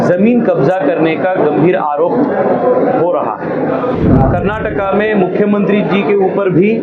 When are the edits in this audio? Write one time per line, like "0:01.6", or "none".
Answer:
0:03.9

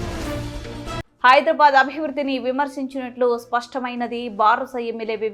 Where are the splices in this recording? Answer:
0:01.0

